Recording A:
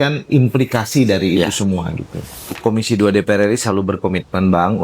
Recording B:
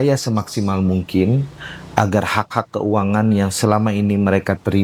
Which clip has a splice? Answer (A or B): A